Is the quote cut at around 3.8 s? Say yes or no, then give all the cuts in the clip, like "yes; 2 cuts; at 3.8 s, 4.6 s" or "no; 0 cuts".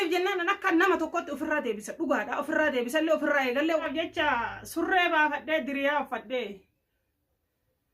yes; 1 cut; at 3.8 s